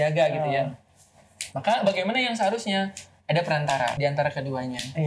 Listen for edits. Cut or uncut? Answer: cut